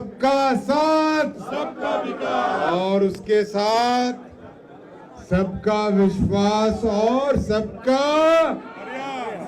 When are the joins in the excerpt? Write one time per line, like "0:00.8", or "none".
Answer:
none